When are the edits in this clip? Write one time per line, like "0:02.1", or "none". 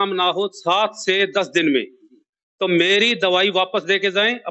none